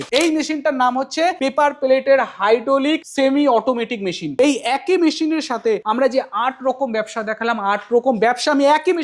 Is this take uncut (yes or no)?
no